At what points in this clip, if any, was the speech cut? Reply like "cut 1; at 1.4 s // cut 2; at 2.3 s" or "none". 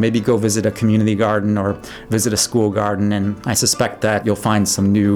cut 1; at 3.4 s // cut 2; at 4.2 s